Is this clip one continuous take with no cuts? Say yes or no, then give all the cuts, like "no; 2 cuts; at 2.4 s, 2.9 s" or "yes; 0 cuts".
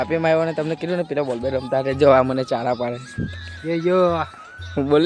yes; 0 cuts